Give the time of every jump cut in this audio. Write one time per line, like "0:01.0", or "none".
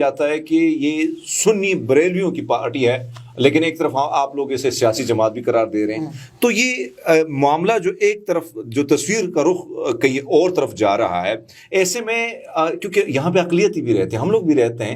none